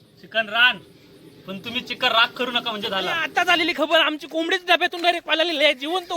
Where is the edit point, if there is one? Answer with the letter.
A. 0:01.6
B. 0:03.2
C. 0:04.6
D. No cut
B